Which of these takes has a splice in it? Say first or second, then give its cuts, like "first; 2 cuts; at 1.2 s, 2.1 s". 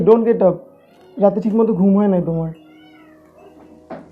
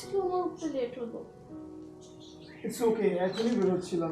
second; 1 cut; at 2.5 s